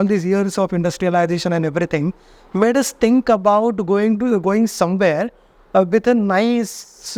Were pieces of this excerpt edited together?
no; 0 cuts

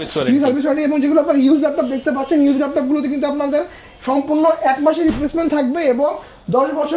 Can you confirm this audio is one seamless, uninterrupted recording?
yes; 0 cuts

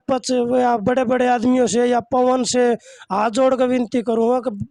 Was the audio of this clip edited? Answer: no; 0 cuts

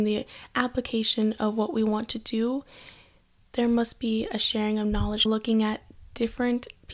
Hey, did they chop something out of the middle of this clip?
yes; 1 cut; at 5.3 s

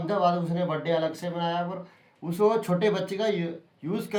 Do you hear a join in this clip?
no; 0 cuts

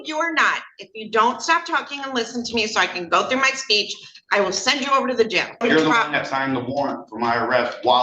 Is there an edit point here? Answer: yes; 1 cut; at 5.6 s

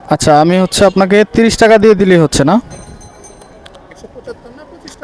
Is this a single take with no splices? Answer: yes; 0 cuts

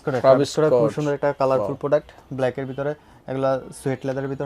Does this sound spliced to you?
no; 0 cuts

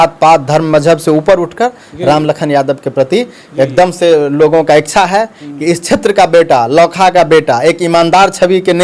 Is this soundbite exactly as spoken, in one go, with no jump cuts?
yes; 0 cuts

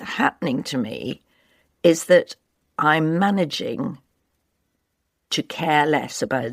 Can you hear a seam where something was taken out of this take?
no; 0 cuts

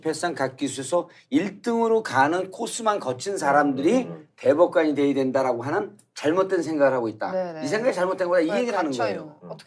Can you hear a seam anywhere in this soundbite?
yes; 1 cut; at 8.2 s

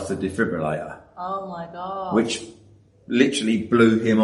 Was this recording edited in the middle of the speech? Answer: no; 0 cuts

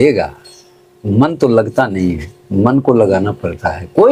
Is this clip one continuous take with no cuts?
yes; 0 cuts

